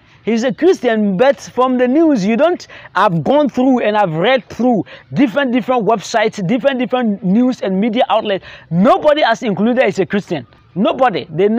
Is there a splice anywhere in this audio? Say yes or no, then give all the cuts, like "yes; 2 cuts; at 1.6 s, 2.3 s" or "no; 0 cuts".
no; 0 cuts